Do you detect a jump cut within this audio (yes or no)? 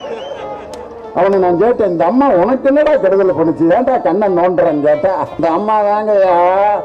yes